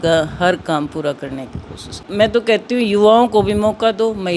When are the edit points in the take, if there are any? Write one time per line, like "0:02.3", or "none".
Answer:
0:02.3